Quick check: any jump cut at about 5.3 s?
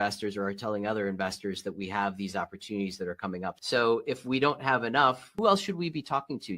yes; 2 cuts; at 3.5 s, 5.3 s

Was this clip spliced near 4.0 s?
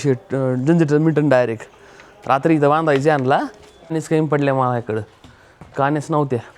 yes; 1 cut; at 4.0 s

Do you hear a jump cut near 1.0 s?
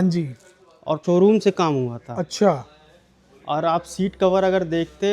yes; 1 cut; at 1.0 s

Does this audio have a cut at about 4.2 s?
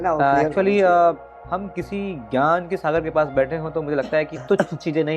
no; 1 cut; at 1.3 s

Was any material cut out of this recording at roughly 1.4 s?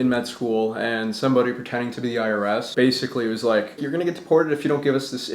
no; 2 cuts; at 2.7 s, 3.9 s

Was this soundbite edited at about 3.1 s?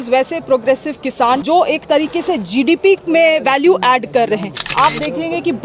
no; 2 cuts; at 1.4 s, 4.6 s

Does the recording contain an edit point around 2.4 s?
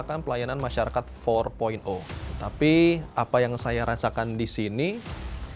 yes; 1 cut; at 2.4 s

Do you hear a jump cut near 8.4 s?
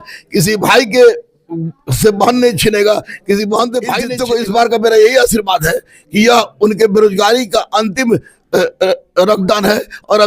no; 1 cut; at 4.1 s

